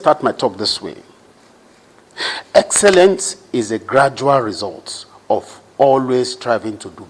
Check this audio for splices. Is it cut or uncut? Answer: uncut